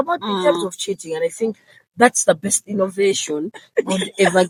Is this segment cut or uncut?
uncut